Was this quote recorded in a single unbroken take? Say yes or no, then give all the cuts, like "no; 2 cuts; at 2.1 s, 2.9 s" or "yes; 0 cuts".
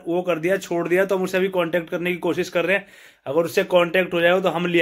yes; 0 cuts